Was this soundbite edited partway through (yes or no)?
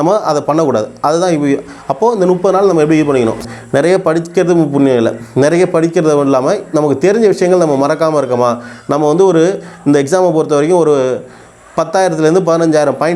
yes